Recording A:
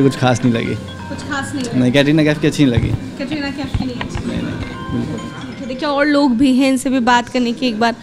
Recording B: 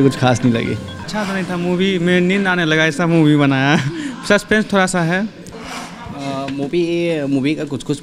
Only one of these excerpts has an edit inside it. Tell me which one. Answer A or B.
B